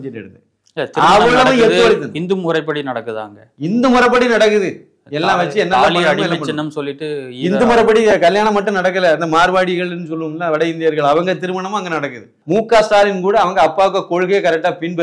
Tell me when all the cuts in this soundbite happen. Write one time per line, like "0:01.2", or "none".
0:12.3